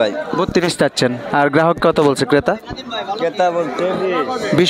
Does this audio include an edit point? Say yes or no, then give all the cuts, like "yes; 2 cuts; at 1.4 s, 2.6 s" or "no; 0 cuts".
no; 0 cuts